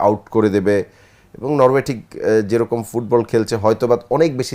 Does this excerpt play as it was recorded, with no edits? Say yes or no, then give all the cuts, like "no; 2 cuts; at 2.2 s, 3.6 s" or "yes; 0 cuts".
yes; 0 cuts